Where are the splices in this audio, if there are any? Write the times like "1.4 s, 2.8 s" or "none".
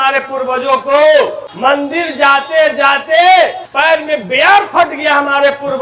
1.4 s, 3.6 s

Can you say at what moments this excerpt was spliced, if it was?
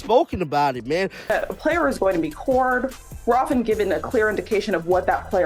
1.2 s

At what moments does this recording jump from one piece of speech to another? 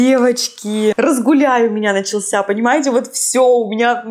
1.0 s

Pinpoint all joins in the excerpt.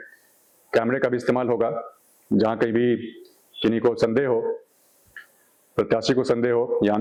none

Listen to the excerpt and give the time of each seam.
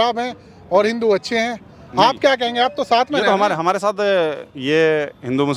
none

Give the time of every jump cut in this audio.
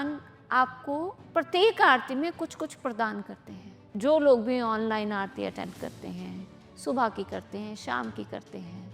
1.2 s

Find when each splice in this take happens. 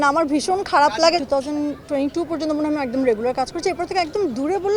1.2 s

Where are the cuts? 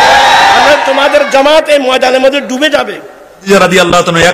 3.4 s

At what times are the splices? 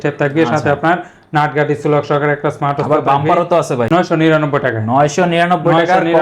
3.9 s

